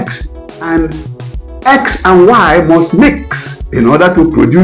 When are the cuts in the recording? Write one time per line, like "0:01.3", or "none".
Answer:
none

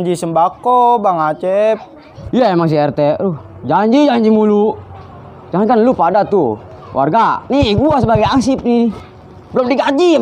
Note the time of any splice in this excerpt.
0:02.1

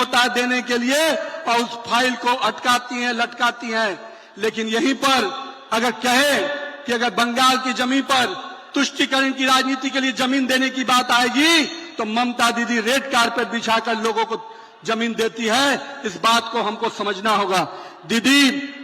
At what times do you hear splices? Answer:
none

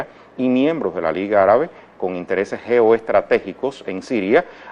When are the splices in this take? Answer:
none

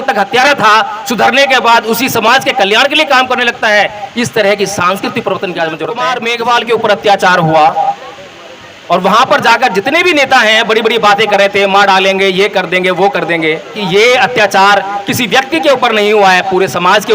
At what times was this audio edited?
0:06.1
0:13.8

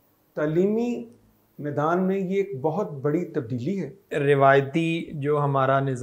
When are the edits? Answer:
0:04.1

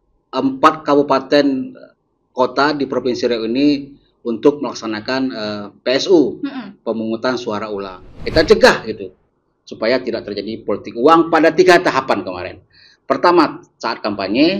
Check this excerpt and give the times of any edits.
0:08.0

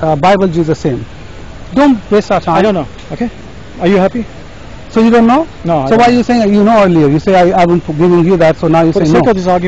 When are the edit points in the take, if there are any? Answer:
none

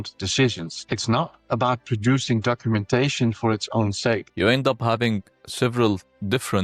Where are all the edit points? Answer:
0:04.3

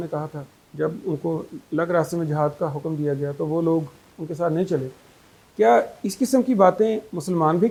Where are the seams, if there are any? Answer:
none

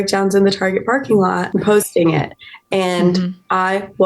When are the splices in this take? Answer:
0:01.4

